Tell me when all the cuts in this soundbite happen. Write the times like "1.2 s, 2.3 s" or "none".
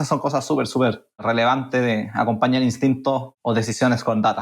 1.2 s, 3.3 s